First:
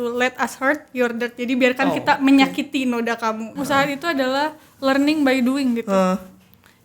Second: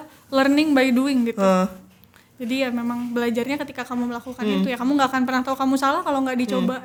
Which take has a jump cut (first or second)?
first